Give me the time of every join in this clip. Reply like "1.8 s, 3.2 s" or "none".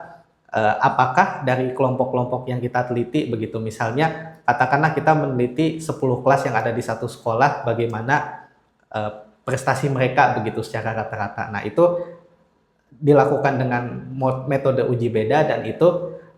none